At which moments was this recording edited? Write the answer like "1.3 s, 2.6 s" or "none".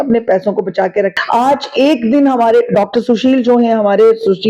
1.2 s

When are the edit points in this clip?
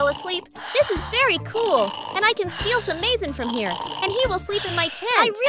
none

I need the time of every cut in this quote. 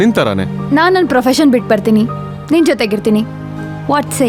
none

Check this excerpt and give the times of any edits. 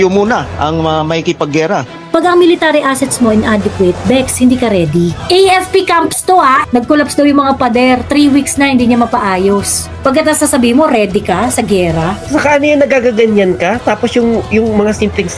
2.0 s, 5.2 s, 6.6 s, 12.2 s

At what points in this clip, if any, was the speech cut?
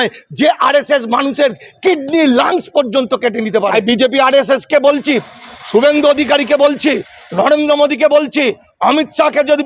3.7 s

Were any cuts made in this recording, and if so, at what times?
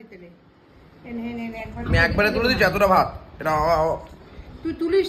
none

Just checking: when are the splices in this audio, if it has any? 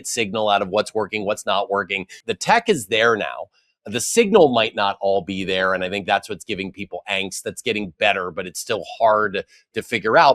2.2 s

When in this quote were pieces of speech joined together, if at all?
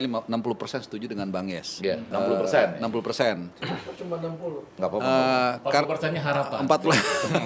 2.0 s

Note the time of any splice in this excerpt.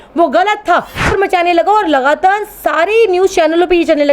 1.1 s

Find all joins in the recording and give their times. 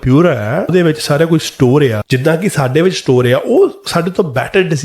0.7 s, 2.0 s

